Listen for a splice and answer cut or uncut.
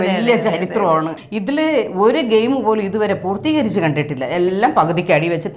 cut